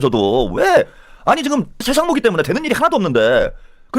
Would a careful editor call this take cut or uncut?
cut